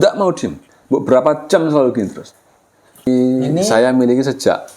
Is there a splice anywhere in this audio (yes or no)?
yes